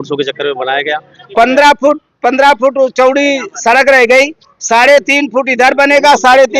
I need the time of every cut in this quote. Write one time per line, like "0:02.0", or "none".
0:01.3